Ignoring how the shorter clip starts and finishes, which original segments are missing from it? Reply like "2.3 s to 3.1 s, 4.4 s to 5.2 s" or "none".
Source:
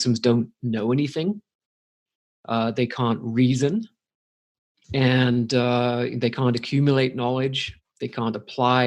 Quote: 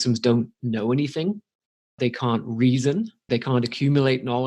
2.0 s to 2.7 s, 4.0 s to 6.1 s